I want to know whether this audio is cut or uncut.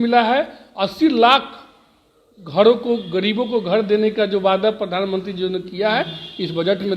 uncut